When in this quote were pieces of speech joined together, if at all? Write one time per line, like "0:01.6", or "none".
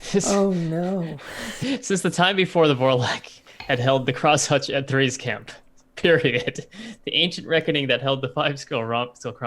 0:01.6